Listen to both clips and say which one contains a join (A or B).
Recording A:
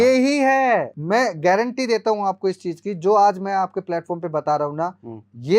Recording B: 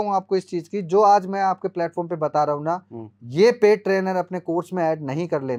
A